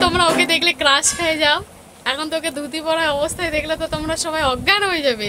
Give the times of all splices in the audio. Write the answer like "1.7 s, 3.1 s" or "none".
none